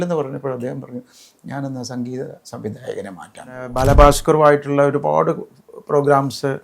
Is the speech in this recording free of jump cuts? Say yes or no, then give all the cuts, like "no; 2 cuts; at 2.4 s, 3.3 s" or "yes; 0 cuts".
no; 1 cut; at 3.7 s